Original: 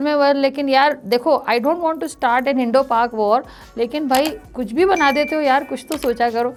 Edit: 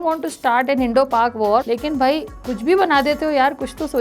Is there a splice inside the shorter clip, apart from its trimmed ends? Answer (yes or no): yes